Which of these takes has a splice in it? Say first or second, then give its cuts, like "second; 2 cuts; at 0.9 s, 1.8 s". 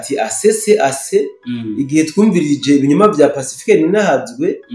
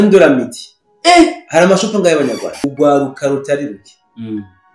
second; 1 cut; at 2.6 s